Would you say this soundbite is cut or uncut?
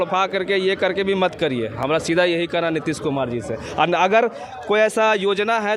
uncut